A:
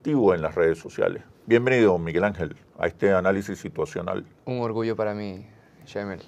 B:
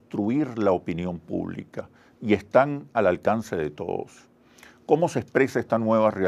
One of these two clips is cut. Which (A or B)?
A